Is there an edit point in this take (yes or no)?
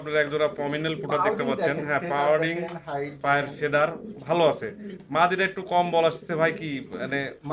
no